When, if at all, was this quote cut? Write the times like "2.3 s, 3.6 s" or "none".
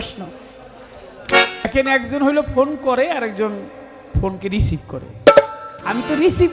1.7 s